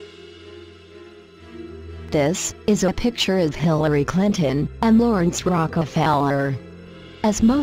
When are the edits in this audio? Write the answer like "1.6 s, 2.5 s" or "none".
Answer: 3.1 s